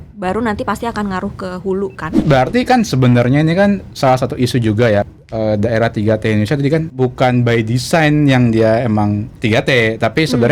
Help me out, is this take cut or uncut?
cut